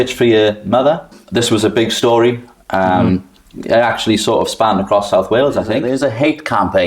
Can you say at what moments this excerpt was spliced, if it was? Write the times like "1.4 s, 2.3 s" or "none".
1.2 s, 5.8 s